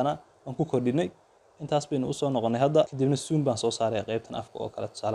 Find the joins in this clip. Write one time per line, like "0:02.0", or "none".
0:02.9